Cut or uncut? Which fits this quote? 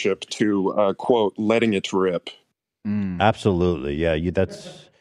uncut